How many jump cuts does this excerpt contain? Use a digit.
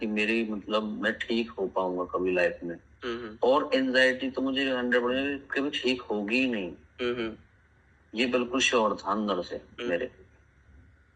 0